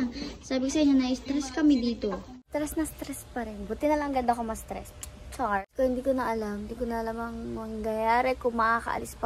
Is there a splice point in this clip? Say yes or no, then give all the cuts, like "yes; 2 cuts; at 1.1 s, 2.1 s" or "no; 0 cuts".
yes; 2 cuts; at 2.3 s, 5.6 s